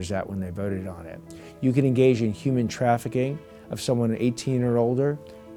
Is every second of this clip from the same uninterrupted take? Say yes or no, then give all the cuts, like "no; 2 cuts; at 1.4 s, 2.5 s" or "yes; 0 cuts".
yes; 0 cuts